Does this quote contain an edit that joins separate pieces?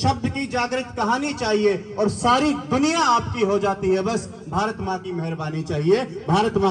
no; 0 cuts

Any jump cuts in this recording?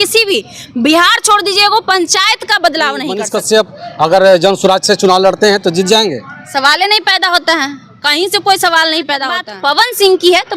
yes; 2 cuts; at 3.2 s, 9.4 s

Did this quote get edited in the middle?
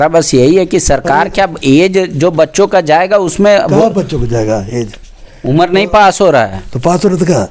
no; 0 cuts

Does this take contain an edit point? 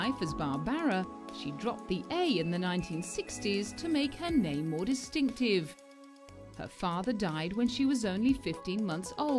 yes; 1 cut; at 2.5 s

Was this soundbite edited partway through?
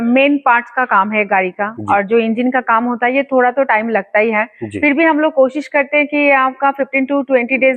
no; 0 cuts

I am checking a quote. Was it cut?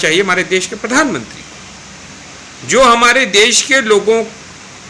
no; 0 cuts

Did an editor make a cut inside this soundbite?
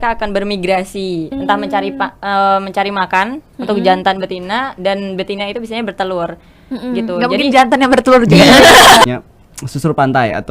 yes; 1 cut; at 9.0 s

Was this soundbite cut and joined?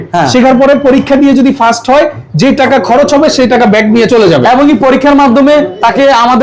no; 0 cuts

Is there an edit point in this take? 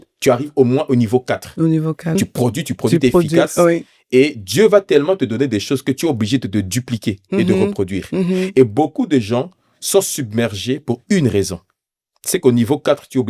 yes; 1 cut; at 2.2 s

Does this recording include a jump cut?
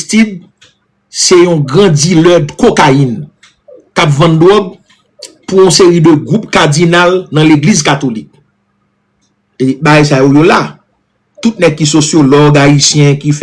no; 0 cuts

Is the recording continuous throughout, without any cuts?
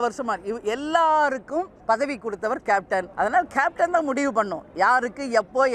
no; 2 cuts; at 1.7 s, 3.1 s

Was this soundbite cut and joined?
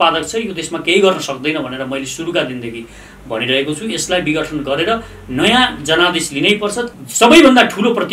yes; 1 cut; at 6.9 s

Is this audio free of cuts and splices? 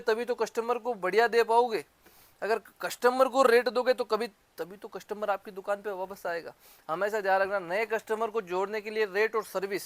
yes; 0 cuts

